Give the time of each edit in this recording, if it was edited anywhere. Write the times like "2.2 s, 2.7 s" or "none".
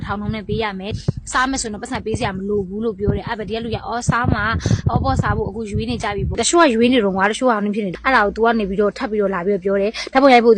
0.9 s, 6.3 s, 7.9 s